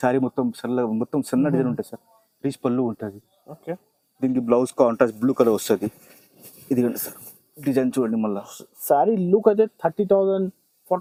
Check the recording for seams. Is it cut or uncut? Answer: uncut